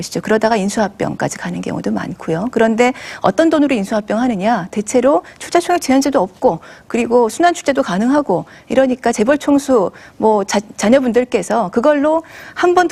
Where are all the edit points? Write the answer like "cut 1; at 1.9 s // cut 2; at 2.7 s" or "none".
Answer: none